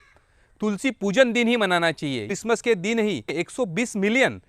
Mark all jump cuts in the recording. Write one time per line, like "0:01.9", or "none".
0:02.2
0:03.3